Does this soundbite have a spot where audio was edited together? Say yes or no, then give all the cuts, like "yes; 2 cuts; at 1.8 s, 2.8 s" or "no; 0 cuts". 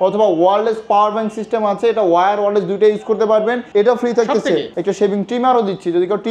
yes; 2 cuts; at 3.6 s, 4.7 s